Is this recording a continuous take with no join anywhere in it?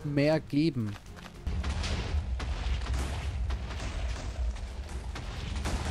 no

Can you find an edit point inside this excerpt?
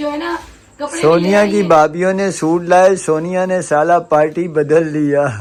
no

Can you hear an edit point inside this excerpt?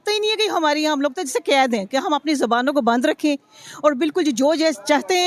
no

